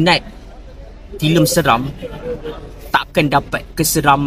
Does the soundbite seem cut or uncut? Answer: uncut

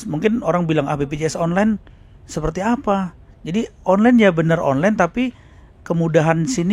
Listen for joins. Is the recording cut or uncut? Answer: uncut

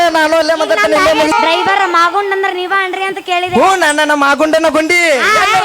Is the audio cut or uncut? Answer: cut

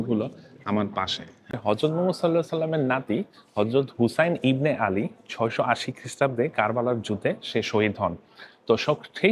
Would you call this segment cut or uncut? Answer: cut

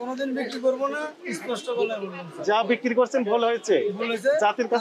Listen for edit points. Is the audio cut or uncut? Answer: uncut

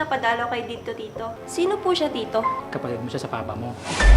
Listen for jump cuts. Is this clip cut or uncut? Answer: cut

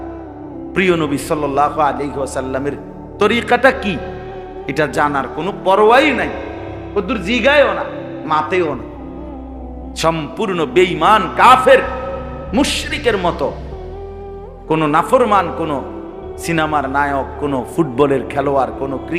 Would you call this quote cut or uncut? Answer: uncut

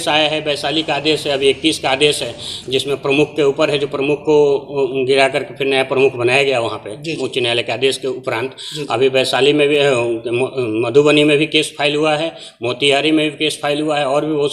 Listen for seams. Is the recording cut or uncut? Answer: uncut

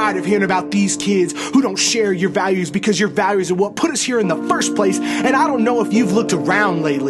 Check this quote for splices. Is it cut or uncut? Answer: uncut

